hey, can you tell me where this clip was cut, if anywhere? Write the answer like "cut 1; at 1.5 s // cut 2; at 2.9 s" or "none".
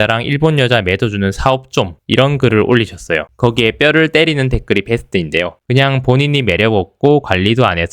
cut 1; at 3.3 s